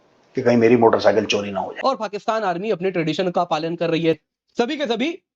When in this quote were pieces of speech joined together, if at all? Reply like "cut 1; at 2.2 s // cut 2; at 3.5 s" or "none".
cut 1; at 1.7 s // cut 2; at 4.2 s